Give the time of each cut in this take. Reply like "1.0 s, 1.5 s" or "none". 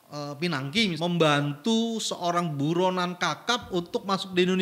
1.0 s